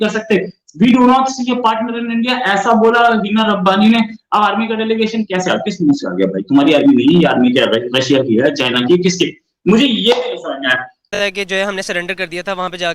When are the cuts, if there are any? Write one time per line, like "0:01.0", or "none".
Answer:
0:11.3